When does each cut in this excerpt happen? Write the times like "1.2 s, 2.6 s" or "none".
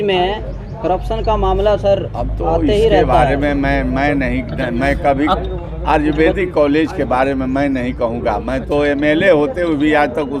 none